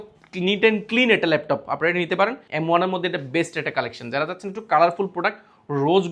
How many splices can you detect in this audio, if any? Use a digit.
1